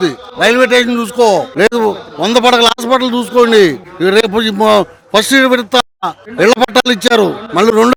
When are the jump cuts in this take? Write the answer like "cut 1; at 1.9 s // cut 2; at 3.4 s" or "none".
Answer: none